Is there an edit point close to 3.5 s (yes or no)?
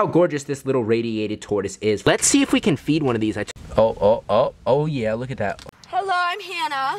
yes